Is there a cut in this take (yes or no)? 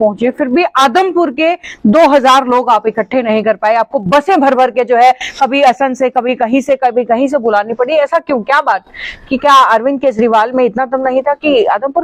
no